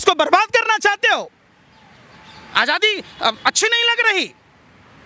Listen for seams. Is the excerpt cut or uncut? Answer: uncut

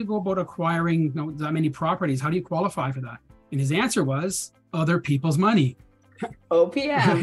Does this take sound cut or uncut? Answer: uncut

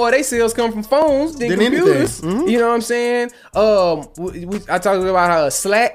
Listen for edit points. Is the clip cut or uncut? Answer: uncut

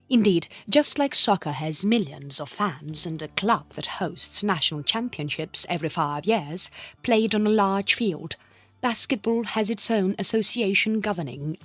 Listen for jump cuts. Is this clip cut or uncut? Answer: uncut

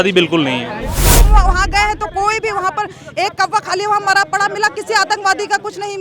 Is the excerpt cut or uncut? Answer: cut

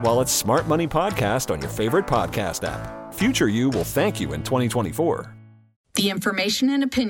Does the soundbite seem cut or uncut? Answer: cut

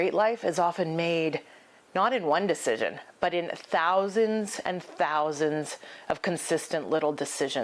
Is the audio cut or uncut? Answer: uncut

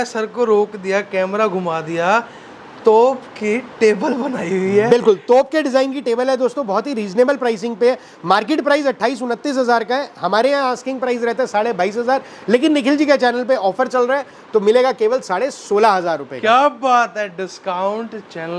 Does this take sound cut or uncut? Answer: uncut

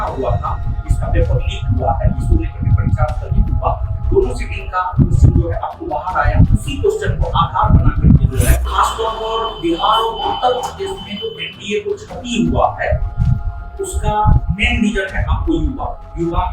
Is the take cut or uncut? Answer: cut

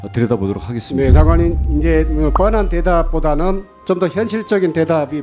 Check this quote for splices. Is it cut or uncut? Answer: uncut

